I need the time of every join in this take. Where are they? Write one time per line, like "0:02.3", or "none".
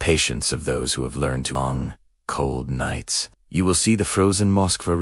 0:01.5